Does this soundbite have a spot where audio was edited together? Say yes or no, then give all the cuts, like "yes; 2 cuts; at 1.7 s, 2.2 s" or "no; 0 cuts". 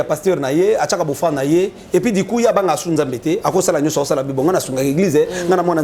no; 0 cuts